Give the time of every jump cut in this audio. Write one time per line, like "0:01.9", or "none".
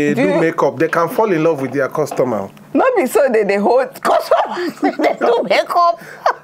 none